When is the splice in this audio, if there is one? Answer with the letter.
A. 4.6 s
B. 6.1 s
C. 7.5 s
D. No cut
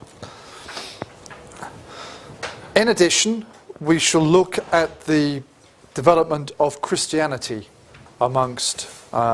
A